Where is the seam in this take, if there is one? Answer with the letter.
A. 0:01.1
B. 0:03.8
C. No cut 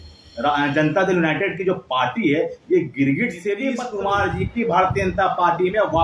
B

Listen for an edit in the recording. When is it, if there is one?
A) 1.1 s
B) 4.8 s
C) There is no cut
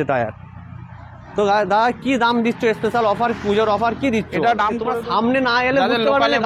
B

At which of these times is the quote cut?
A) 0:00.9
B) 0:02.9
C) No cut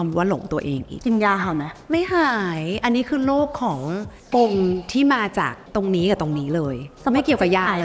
A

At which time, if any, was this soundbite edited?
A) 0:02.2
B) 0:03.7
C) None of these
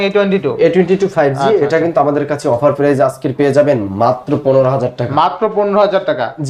C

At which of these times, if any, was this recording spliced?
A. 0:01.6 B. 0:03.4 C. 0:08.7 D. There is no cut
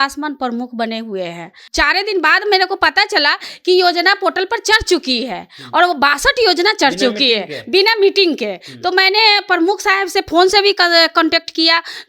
A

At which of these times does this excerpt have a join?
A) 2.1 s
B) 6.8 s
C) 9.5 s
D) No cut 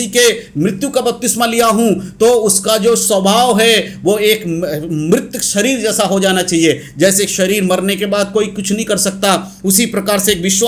D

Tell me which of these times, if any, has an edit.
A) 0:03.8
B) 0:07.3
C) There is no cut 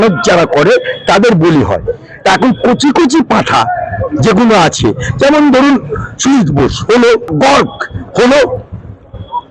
B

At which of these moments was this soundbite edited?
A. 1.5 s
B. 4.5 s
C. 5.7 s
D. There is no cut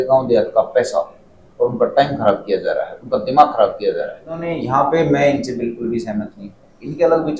B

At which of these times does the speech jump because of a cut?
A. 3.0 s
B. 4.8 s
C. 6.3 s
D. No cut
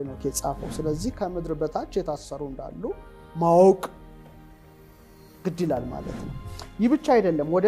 D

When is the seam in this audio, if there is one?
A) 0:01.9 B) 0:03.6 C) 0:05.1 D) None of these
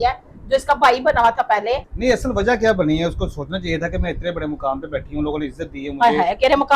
A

